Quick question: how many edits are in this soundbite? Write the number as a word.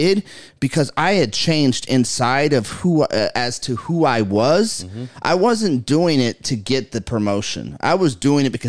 zero